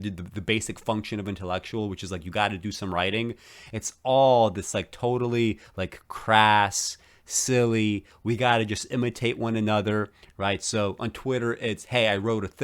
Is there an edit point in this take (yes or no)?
no